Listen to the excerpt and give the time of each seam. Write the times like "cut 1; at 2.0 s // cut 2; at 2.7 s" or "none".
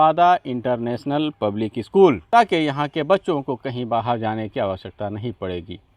cut 1; at 2.2 s